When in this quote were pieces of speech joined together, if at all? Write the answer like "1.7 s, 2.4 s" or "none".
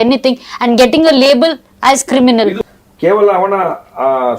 2.6 s